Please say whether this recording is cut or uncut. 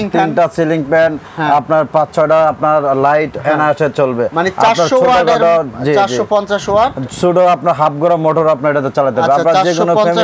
uncut